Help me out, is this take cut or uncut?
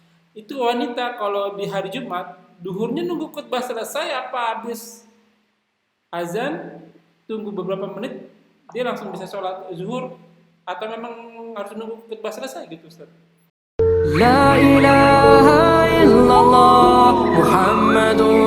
cut